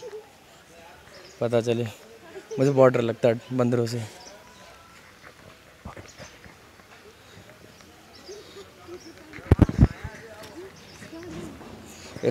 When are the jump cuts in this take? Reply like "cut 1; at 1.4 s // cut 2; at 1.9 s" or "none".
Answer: none